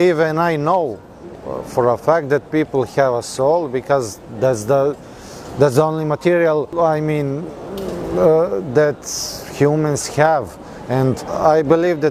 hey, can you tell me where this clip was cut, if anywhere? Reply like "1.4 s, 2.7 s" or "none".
none